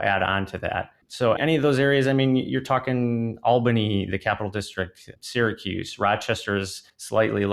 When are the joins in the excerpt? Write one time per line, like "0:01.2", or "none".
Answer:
0:01.4
0:05.1